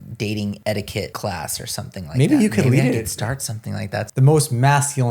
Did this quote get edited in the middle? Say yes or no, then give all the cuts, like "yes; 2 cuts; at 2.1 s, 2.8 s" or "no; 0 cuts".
yes; 2 cuts; at 0.9 s, 4.0 s